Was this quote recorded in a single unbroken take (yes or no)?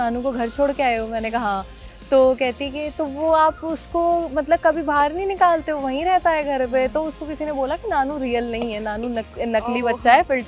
yes